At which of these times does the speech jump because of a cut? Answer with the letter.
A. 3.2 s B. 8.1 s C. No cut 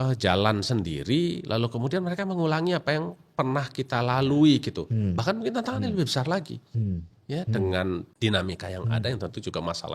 B